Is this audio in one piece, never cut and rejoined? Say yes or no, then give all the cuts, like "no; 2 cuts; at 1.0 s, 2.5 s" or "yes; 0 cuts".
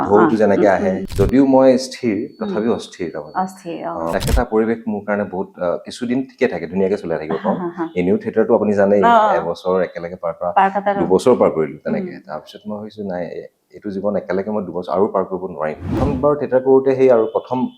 no; 3 cuts; at 1.0 s, 4.1 s, 16.0 s